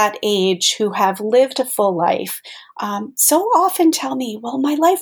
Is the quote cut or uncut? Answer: uncut